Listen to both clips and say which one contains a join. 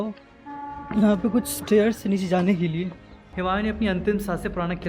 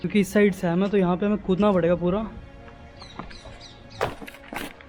first; 1 cut; at 3.4 s

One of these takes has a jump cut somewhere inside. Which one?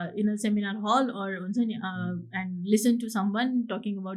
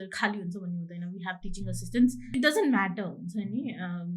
second; 1 cut; at 2.3 s

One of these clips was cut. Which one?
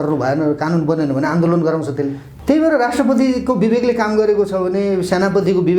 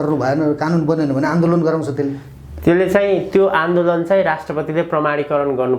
first; 1 cut; at 2.3 s

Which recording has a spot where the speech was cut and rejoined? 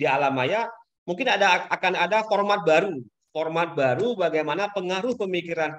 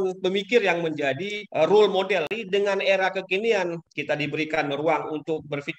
second; 3 cuts; at 1.4 s, 2.3 s, 3.8 s

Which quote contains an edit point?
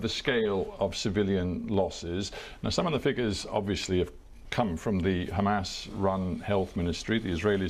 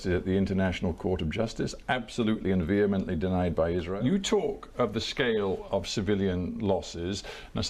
second; 1 cut; at 3.9 s

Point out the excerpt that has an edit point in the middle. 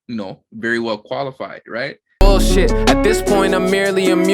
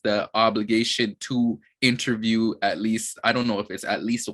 first; 1 cut; at 2.2 s

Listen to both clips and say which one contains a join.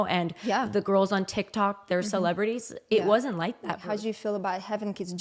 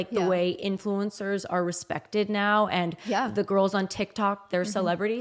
first; 1 cut; at 3.8 s

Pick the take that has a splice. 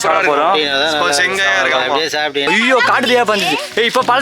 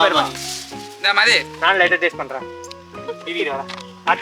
first; 1 cut; at 2.5 s

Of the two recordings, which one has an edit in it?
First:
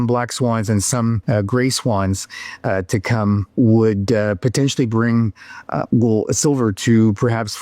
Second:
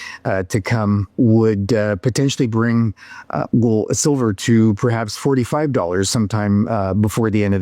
first; 1 cut; at 1.2 s

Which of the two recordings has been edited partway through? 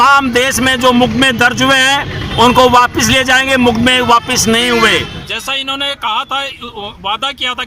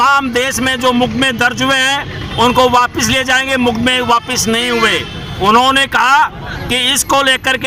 first; 1 cut; at 5.2 s

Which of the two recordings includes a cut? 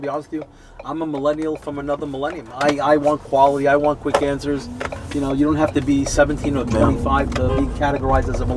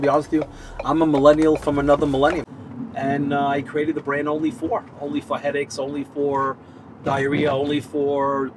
second; 1 cut; at 2.5 s

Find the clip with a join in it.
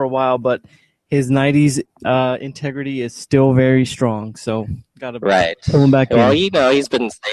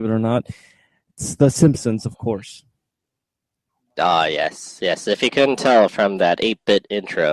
second; 1 cut; at 4.5 s

